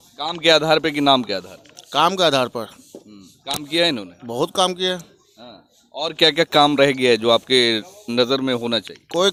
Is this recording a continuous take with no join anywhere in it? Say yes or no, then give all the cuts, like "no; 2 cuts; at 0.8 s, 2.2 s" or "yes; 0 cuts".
yes; 0 cuts